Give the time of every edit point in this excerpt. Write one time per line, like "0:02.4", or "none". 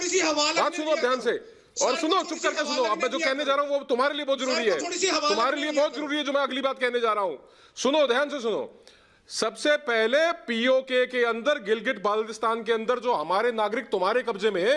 none